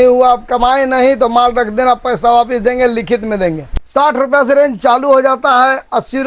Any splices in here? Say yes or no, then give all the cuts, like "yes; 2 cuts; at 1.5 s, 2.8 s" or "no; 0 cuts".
yes; 1 cut; at 3.6 s